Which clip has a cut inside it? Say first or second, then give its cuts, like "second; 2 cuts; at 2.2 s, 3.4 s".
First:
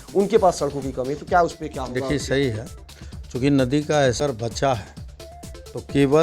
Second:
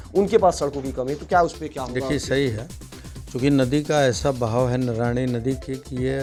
first; 1 cut; at 4.2 s